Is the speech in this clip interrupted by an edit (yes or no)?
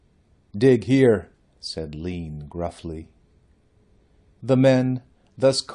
yes